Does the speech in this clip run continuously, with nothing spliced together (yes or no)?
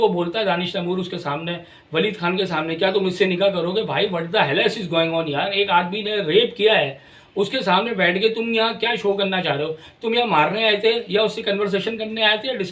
yes